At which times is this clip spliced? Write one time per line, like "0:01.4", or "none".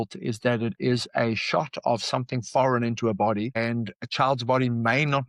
none